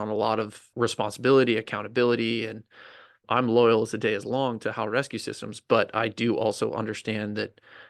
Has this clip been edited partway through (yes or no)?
no